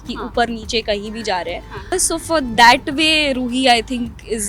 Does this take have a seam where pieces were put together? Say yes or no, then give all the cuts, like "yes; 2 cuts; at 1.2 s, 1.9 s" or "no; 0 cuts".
yes; 1 cut; at 1.9 s